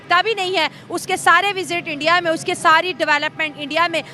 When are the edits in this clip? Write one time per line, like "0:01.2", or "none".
none

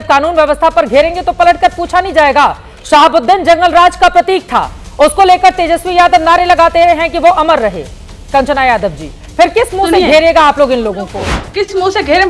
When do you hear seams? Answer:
0:11.4

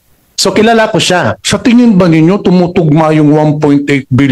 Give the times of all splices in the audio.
0:01.4

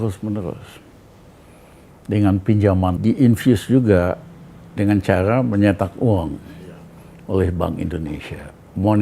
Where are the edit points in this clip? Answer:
0:03.0

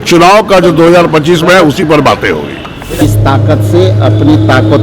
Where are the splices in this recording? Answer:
0:03.0

